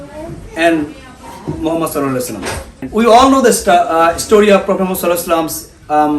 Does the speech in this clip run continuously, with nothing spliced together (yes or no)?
no